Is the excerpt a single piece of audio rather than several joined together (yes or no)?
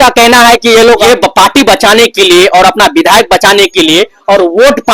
no